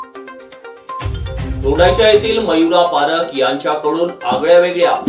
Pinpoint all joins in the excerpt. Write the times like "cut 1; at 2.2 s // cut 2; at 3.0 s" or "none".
cut 1; at 1.1 s